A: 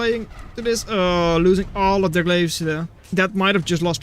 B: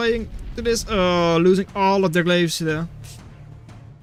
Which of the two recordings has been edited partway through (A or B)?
A